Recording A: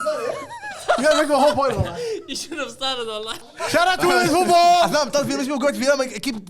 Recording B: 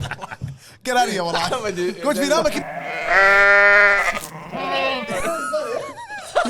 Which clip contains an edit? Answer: A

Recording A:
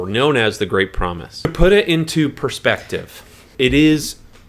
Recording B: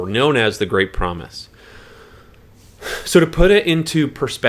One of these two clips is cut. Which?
A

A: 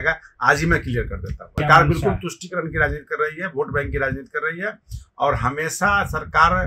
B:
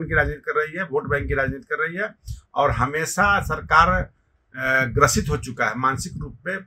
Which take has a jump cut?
A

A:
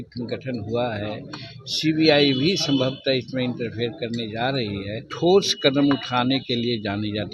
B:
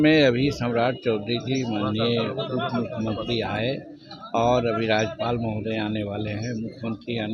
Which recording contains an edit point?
A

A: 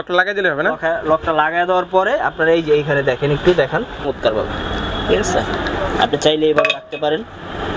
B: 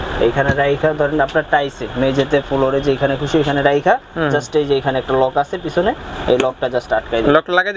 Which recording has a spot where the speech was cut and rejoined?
A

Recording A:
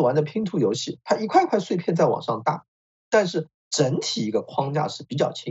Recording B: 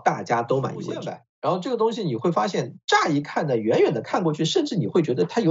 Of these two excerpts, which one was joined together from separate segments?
B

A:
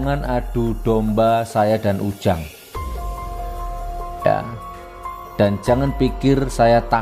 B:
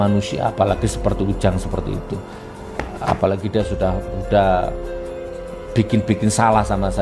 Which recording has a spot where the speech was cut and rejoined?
A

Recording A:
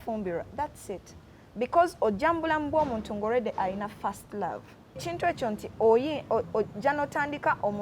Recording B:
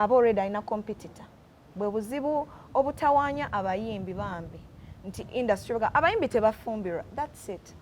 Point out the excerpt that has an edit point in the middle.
A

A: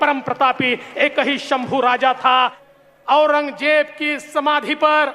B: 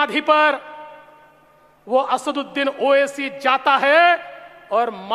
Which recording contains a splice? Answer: A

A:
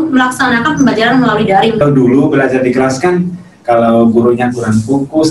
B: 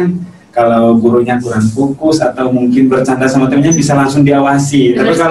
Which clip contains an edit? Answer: A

